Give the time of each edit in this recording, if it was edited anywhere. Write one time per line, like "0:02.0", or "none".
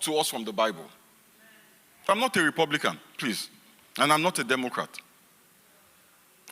0:02.1

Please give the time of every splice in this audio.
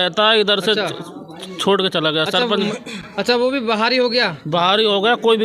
none

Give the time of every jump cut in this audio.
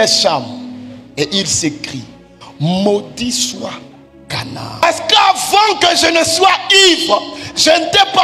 0:04.8

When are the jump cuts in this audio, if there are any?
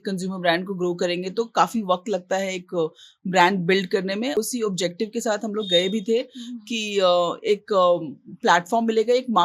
0:04.4

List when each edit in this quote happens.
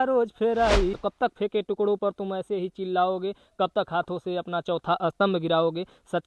0:01.0

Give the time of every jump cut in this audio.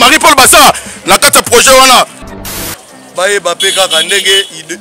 0:02.5

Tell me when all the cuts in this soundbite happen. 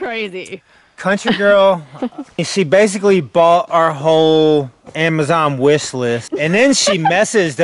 0:02.5

